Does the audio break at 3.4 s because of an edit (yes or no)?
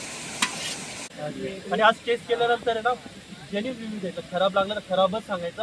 no